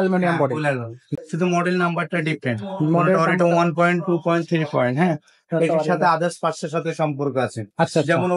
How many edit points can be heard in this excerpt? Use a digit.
1